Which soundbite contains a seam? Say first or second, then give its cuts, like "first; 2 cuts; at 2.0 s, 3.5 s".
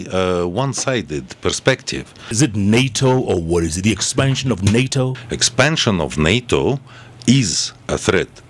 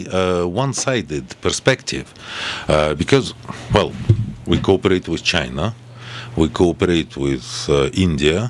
first; 2 cuts; at 2.3 s, 5.2 s